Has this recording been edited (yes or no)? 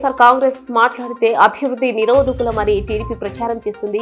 no